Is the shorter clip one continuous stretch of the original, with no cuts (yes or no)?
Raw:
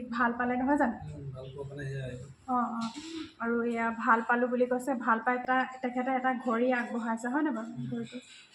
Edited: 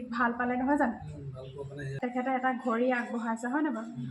no